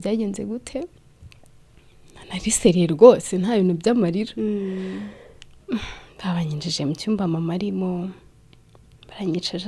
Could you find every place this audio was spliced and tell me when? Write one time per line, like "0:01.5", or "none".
none